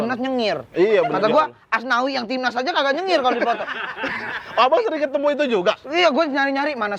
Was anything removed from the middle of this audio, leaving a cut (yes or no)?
no